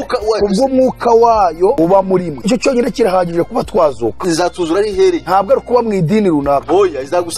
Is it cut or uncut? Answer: uncut